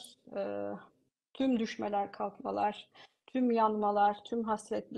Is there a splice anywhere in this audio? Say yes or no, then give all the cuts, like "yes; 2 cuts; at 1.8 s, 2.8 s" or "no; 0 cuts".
no; 0 cuts